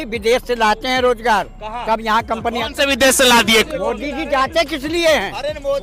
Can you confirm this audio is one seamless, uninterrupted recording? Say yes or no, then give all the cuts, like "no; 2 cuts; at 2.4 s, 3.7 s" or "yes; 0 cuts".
no; 1 cut; at 3.7 s